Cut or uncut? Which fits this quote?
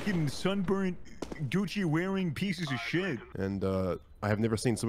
cut